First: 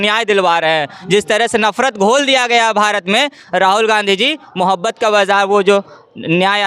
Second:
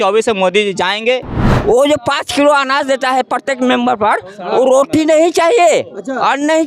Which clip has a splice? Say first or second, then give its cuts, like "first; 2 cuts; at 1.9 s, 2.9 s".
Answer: second; 1 cut; at 1.4 s